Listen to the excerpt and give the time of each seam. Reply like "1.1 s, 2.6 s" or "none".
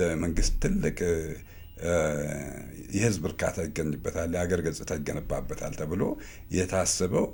none